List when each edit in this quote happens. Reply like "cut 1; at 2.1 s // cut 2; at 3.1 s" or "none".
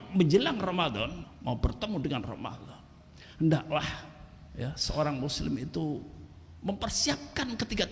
cut 1; at 1.2 s